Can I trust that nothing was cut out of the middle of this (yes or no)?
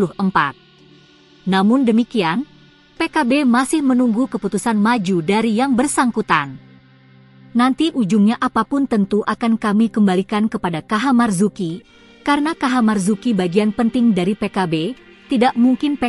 yes